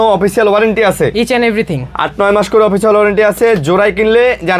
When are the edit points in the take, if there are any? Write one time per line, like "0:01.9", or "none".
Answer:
none